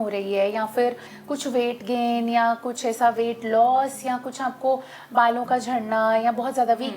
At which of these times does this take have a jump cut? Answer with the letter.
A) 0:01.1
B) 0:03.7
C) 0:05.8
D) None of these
A